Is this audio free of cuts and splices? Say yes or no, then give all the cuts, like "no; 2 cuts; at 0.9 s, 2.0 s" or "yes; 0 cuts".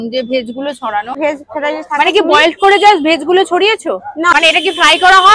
no; 2 cuts; at 1.2 s, 4.3 s